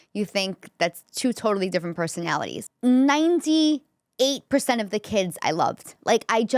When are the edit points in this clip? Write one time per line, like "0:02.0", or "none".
0:02.6